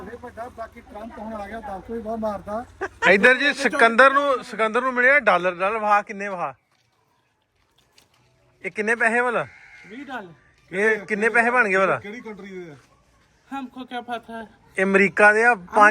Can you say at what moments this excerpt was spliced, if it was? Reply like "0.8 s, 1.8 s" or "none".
2.8 s